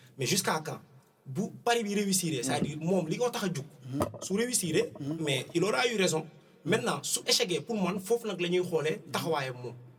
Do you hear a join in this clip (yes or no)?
no